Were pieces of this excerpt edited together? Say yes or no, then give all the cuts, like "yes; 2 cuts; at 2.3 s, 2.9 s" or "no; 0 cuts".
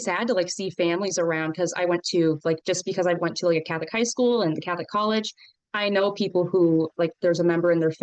no; 0 cuts